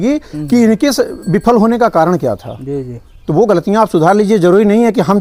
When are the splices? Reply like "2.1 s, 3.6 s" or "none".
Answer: none